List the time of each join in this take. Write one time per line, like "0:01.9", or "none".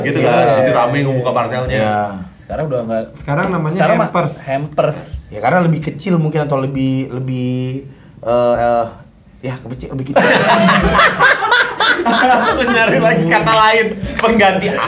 none